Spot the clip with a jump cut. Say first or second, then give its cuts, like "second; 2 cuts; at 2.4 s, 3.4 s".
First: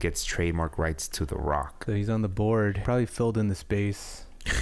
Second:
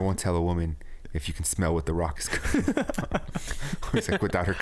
first; 2 cuts; at 1.8 s, 2.8 s